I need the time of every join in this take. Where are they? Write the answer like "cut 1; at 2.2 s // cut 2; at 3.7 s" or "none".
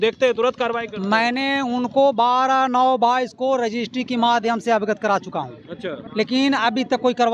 cut 1; at 6.0 s